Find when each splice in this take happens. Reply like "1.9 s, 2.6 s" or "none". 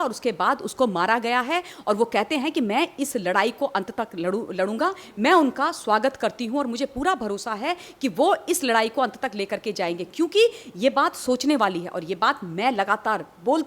none